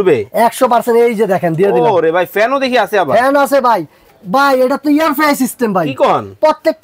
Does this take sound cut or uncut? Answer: uncut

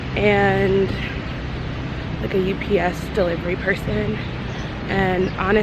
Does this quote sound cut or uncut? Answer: uncut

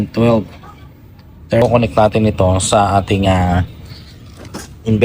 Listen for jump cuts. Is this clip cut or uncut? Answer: cut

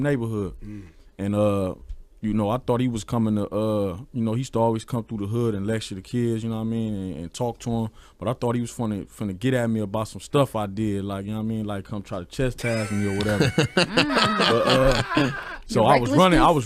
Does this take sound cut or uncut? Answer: uncut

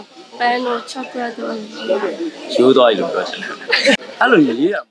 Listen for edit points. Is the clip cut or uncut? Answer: cut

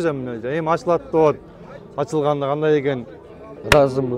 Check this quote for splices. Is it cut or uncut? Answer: uncut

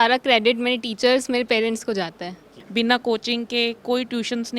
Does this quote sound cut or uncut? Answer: cut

